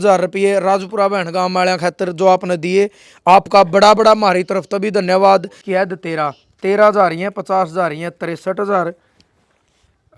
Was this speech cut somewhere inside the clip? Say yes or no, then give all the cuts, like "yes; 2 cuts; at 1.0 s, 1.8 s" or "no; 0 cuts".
yes; 1 cut; at 5.6 s